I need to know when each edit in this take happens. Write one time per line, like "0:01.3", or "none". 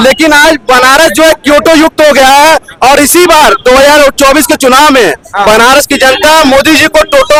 none